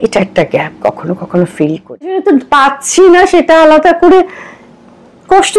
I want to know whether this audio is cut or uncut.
cut